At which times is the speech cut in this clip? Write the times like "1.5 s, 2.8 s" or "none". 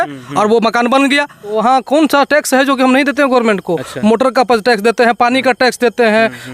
1.6 s